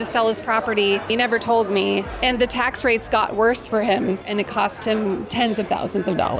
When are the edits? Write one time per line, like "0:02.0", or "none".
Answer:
0:01.1
0:02.2
0:04.3